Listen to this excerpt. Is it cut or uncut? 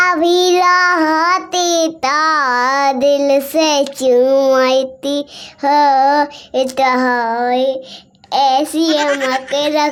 uncut